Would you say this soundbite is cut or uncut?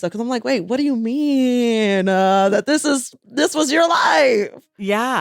uncut